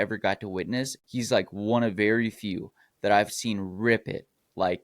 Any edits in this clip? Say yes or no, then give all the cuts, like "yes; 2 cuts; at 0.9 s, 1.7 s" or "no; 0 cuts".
yes; 1 cut; at 1.0 s